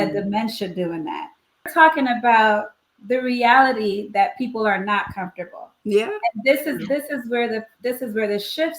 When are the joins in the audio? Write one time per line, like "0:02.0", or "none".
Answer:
0:01.7